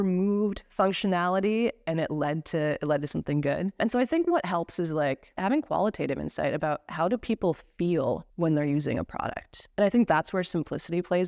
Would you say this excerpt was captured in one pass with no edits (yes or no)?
no